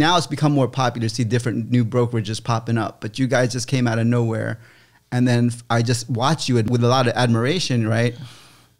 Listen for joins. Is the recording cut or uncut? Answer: cut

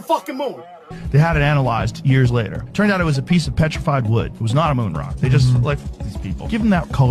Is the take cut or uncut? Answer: cut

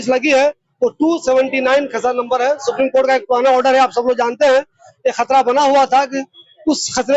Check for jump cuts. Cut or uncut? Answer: uncut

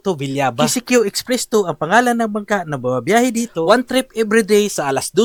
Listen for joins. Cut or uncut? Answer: uncut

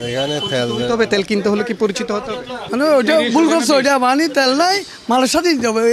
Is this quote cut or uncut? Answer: cut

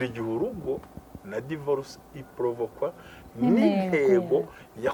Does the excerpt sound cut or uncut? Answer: uncut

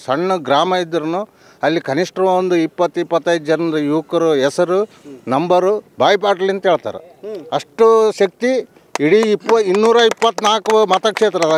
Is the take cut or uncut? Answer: cut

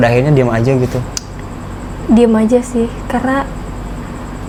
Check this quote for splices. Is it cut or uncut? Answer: uncut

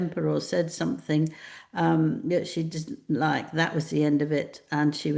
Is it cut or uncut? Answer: uncut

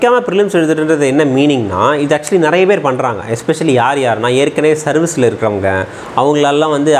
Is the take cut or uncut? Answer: uncut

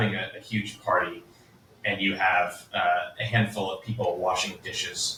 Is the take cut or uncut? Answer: uncut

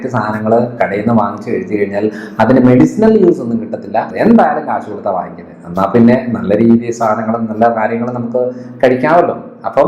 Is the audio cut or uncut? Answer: cut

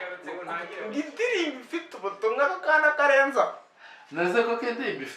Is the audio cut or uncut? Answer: uncut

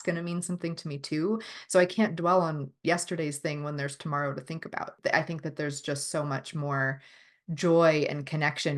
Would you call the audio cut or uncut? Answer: cut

